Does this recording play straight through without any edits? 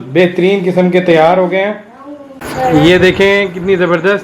no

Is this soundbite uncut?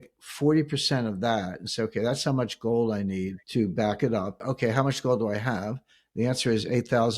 no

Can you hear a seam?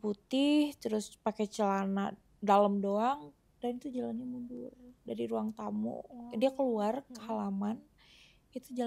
no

